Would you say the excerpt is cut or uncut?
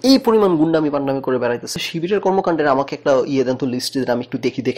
cut